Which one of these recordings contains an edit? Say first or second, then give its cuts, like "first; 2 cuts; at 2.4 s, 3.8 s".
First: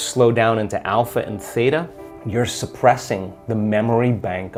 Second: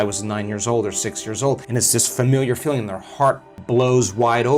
second; 2 cuts; at 1.6 s, 3.5 s